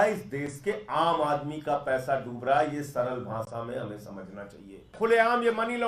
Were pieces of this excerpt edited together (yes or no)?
yes